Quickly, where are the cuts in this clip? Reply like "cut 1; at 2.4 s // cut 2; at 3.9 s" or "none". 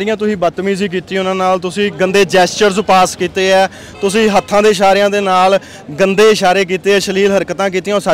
none